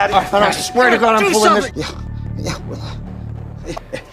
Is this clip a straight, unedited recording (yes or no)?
yes